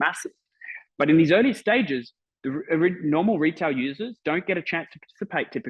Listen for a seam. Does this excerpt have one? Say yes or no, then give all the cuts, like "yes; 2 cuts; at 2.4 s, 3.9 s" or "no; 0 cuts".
no; 0 cuts